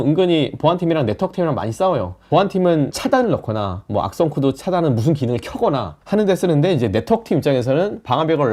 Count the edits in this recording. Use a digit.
0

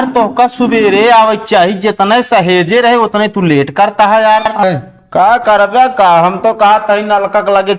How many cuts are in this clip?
1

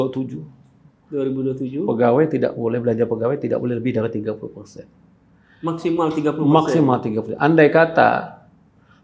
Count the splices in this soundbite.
0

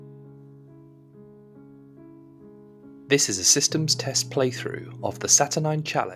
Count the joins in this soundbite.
1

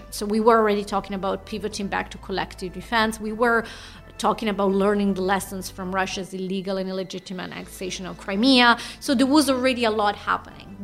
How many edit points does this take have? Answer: 1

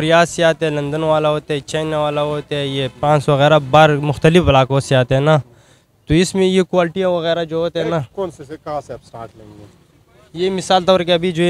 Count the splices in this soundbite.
0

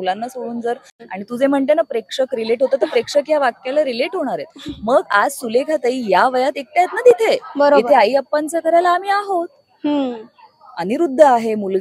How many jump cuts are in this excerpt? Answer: 1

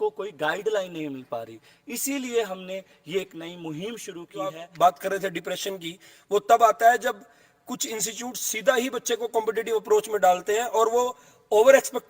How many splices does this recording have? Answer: 1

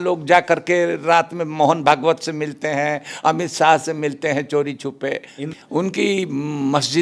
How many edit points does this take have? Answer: 1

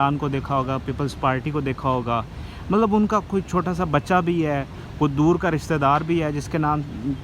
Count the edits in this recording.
0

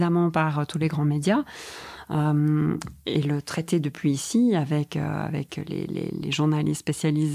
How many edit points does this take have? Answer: 0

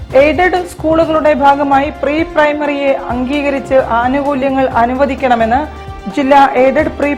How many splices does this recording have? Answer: 0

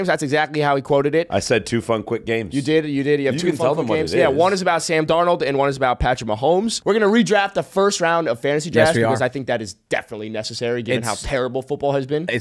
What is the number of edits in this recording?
1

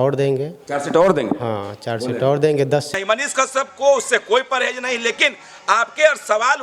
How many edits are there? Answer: 1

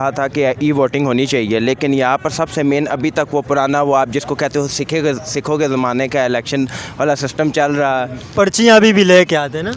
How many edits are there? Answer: 0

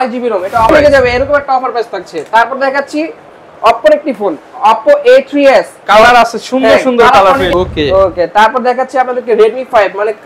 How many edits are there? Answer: 2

